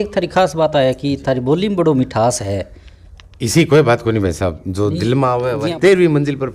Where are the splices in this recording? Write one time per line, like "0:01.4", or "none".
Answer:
0:05.6